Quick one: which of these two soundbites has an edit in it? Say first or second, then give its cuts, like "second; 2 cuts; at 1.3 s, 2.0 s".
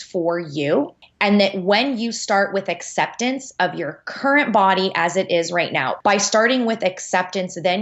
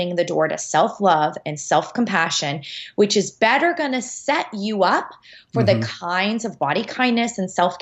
first; 2 cuts; at 1.0 s, 5.8 s